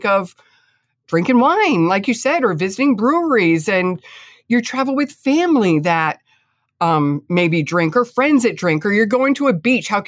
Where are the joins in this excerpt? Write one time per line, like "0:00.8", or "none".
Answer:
none